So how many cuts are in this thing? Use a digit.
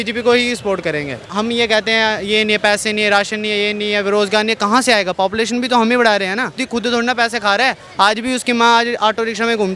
2